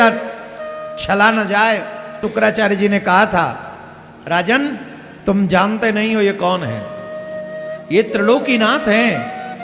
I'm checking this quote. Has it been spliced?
yes; 1 cut; at 2.2 s

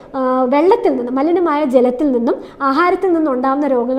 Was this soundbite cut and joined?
no; 0 cuts

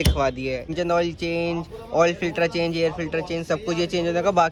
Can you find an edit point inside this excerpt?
no; 0 cuts

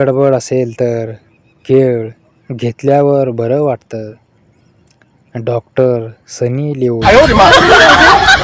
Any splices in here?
no; 0 cuts

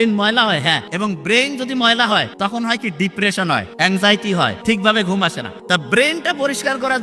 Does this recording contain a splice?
yes; 5 cuts; at 0.9 s, 2.3 s, 3.7 s, 4.6 s, 5.5 s

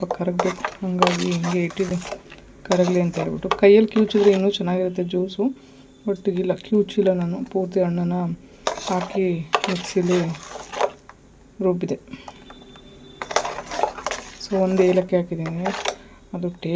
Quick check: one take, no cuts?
yes; 0 cuts

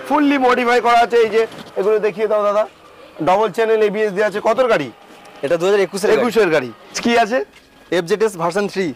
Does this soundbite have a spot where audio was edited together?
yes; 1 cut; at 7.0 s

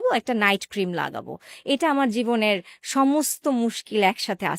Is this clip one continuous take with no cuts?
yes; 0 cuts

